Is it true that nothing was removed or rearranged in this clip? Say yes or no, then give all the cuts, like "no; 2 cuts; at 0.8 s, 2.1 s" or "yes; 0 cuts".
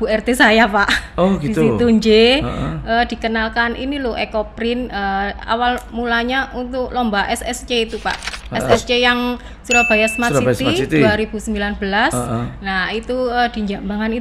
yes; 0 cuts